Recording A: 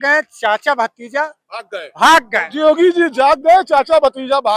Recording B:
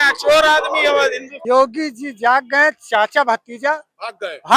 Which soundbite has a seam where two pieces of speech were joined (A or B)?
B